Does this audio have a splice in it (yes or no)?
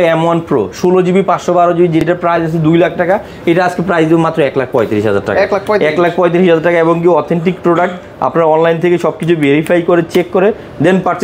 no